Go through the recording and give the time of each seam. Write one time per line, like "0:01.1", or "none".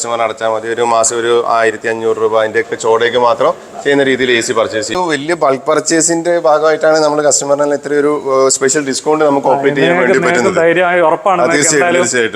0:04.9